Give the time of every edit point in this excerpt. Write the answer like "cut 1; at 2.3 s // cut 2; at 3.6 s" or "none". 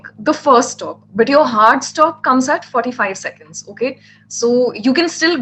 none

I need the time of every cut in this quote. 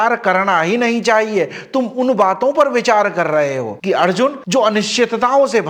cut 1; at 3.8 s

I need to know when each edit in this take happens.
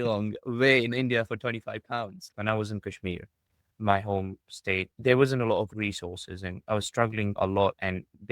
cut 1; at 2.3 s // cut 2; at 4.9 s // cut 3; at 5.7 s // cut 4; at 7.4 s

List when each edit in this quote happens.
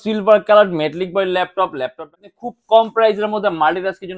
cut 1; at 2.4 s

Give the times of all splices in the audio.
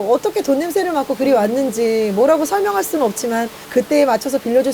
cut 1; at 3.6 s

